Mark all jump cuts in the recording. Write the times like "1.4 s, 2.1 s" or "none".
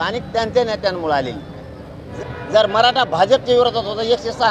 2.0 s